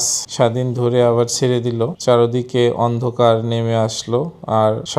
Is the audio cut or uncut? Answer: cut